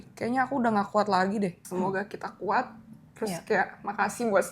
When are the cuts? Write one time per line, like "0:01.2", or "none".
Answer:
0:01.6